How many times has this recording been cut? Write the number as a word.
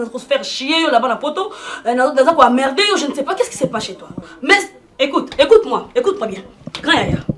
one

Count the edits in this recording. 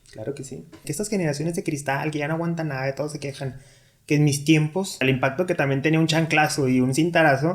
two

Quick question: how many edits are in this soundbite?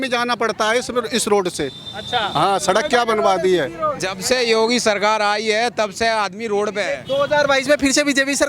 two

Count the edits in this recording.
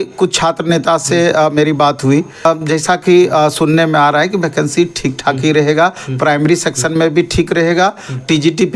one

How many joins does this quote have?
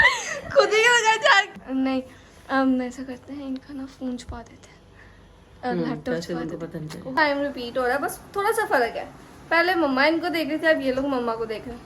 two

